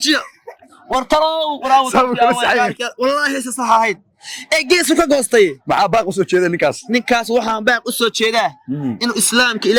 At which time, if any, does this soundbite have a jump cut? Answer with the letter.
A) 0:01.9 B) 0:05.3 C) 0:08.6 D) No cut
D